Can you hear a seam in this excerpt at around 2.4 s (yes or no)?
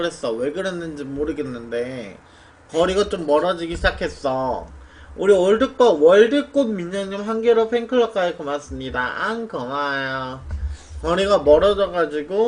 no